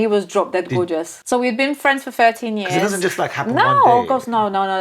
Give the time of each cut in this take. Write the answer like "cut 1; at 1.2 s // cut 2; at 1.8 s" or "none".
cut 1; at 1.2 s